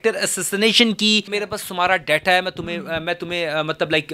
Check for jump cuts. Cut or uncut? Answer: cut